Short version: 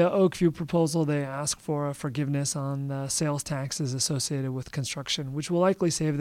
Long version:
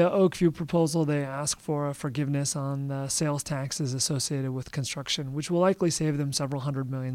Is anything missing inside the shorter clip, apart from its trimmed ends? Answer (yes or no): no